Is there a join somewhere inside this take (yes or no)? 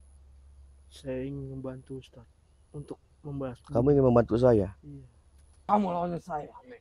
yes